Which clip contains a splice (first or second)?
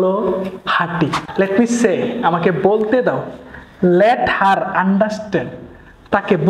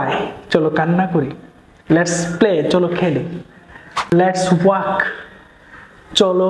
first